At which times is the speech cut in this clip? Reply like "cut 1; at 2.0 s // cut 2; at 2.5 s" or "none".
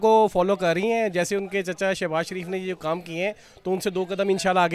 none